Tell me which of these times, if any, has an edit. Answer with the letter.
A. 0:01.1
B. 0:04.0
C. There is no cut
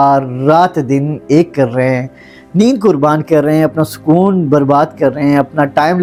C